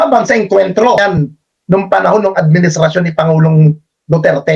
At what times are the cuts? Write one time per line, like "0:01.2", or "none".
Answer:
0:01.0